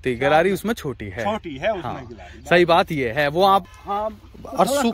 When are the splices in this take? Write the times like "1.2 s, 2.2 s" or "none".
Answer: 3.7 s